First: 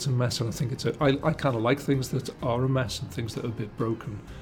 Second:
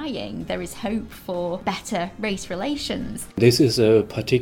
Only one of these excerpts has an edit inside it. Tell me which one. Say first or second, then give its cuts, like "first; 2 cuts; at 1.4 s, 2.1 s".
second; 2 cuts; at 1.6 s, 3.2 s